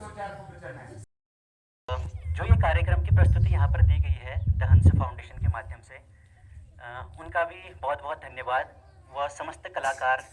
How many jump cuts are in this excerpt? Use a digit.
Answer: 1